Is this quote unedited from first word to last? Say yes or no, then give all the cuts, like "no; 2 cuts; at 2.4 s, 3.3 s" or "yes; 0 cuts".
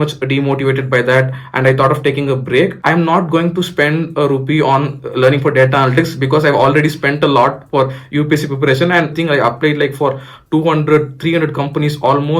no; 2 cuts; at 2.8 s, 9.1 s